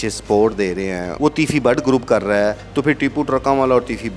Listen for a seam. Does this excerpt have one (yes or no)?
yes